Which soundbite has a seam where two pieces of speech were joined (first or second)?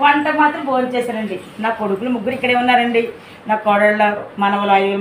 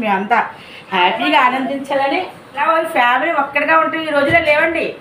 second